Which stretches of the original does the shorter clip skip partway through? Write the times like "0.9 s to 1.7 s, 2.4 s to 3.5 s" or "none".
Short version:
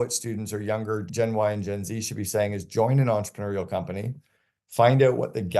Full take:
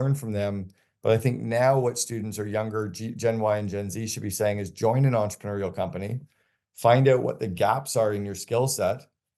2.9 s to 3.1 s